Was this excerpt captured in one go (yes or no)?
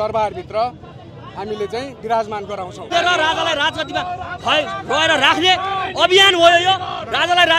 no